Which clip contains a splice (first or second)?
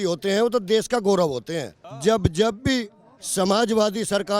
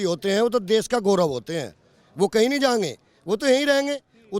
first